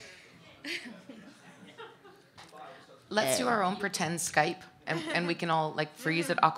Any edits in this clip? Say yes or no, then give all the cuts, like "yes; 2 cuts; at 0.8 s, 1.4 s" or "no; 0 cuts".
yes; 1 cut; at 5.6 s